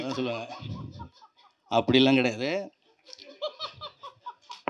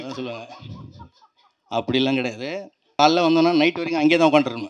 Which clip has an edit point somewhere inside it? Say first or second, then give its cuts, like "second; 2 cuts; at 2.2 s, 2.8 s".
second; 1 cut; at 2.8 s